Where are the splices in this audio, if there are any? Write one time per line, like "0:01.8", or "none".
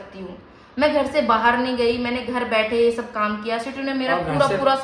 none